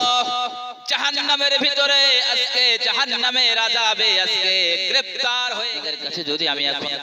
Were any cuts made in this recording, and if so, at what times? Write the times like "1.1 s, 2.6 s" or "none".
5.8 s